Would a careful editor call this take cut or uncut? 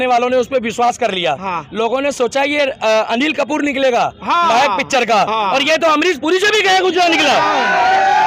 uncut